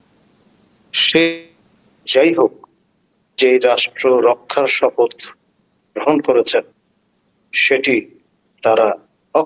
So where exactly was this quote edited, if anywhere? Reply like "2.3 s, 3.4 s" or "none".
2.1 s